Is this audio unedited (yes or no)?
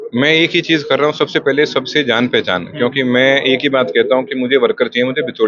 yes